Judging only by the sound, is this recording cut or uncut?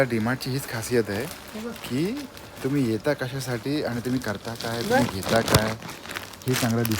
uncut